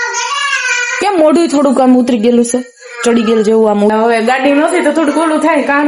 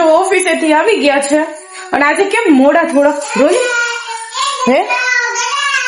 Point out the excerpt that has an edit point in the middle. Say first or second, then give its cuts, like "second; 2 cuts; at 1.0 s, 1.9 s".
first; 1 cut; at 3.9 s